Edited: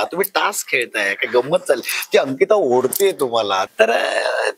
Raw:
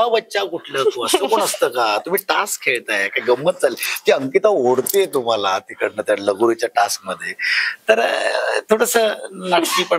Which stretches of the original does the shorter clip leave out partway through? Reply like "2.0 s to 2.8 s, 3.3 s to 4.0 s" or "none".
5.6 s to 7.8 s